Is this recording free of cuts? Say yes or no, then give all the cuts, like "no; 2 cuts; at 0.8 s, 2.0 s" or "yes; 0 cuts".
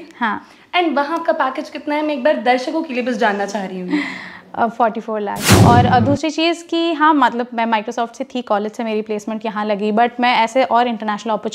no; 1 cut; at 5.5 s